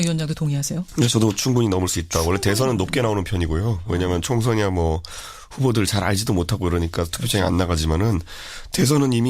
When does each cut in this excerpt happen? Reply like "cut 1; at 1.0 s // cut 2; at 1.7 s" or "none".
cut 1; at 4.9 s